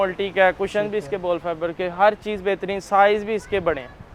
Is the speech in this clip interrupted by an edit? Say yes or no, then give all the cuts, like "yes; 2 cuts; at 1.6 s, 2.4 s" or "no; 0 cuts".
no; 0 cuts